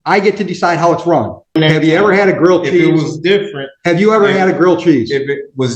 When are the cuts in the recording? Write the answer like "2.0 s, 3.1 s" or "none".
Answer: 1.6 s